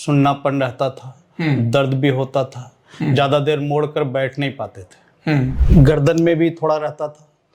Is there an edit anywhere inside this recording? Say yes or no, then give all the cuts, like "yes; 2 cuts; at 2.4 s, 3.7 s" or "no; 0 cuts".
yes; 1 cut; at 5.6 s